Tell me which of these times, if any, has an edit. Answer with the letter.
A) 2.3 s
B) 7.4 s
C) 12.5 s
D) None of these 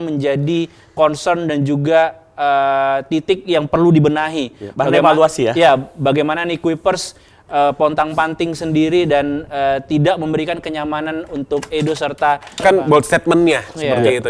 C